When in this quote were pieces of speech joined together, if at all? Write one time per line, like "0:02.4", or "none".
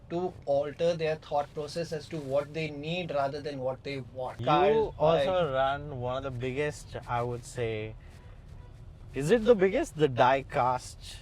0:04.3